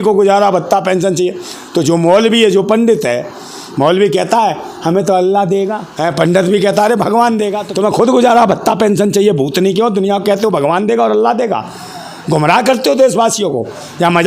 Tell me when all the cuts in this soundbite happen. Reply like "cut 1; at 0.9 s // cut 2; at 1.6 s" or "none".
cut 1; at 5.8 s // cut 2; at 7.6 s